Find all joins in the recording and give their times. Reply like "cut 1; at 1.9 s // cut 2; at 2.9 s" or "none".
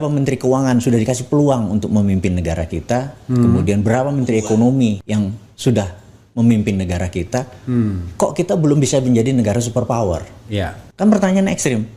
none